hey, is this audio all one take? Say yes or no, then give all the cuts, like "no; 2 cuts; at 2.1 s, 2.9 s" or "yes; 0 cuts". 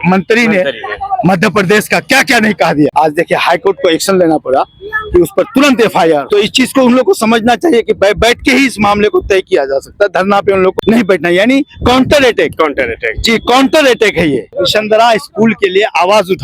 no; 5 cuts; at 2.9 s, 6.2 s, 10.7 s, 12.5 s, 14.4 s